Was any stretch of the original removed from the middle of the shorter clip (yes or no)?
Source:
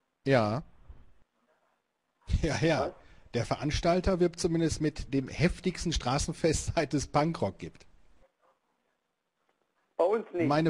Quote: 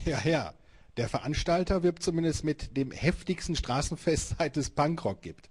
no